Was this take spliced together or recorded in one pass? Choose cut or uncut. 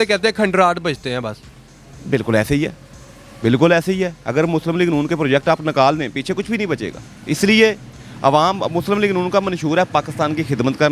uncut